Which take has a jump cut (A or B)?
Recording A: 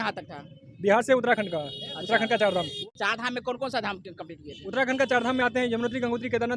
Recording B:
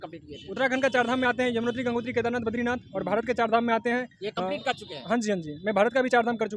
A